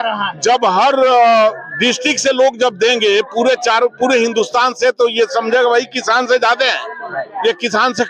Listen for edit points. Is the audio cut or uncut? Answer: uncut